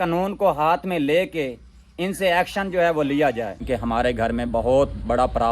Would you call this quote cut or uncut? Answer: cut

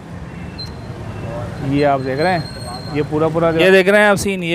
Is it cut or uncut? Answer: cut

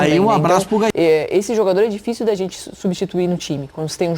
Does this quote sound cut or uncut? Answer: cut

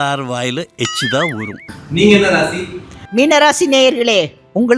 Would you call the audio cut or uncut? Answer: cut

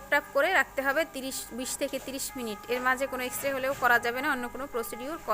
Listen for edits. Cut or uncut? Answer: uncut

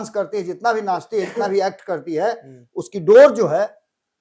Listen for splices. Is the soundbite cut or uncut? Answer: uncut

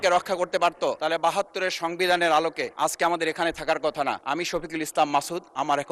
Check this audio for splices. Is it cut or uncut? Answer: cut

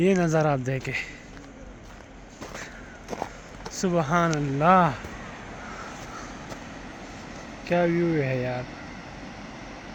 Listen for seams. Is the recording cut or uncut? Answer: uncut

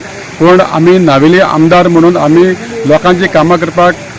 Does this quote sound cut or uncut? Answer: uncut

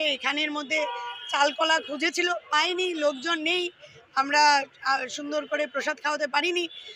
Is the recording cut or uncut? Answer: uncut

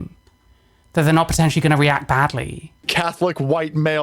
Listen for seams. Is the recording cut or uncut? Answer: cut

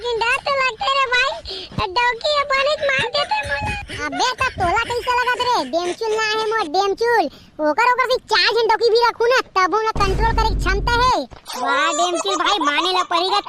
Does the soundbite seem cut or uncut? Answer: cut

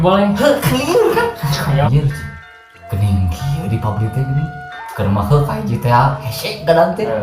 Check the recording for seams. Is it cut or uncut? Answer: cut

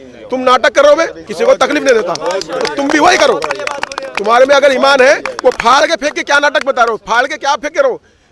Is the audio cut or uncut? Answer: cut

